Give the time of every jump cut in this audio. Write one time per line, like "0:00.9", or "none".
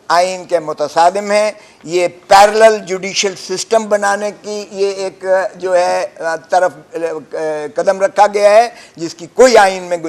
none